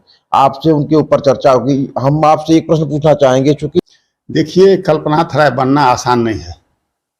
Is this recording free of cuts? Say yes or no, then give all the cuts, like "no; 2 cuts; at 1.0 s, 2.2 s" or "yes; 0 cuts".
no; 1 cut; at 3.7 s